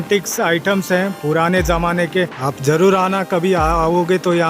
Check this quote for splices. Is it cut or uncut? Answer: cut